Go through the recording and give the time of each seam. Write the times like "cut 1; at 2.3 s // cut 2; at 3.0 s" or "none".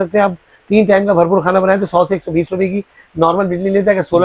none